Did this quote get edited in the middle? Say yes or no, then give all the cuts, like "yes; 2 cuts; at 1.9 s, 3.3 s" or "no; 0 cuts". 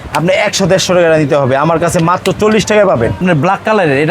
yes; 1 cut; at 3.2 s